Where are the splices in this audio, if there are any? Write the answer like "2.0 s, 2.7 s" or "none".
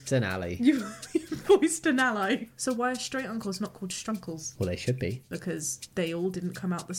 2.5 s, 4.5 s, 5.4 s